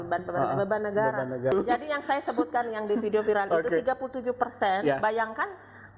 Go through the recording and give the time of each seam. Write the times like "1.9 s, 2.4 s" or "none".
1.5 s